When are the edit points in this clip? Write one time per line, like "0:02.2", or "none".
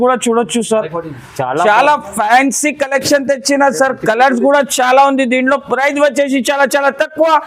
none